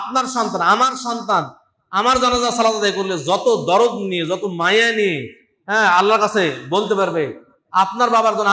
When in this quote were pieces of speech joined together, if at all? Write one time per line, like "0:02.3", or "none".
none